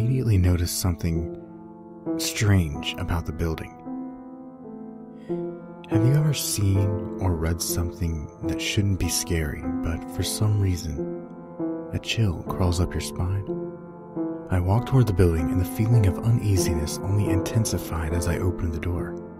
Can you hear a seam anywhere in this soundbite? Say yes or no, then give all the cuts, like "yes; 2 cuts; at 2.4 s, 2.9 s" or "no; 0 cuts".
yes; 1 cut; at 12.2 s